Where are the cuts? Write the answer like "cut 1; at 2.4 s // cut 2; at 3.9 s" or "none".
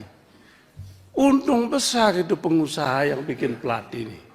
none